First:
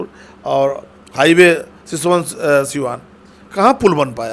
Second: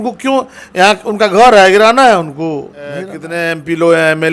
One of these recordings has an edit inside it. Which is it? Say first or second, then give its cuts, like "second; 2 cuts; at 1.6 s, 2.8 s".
second; 1 cut; at 3.2 s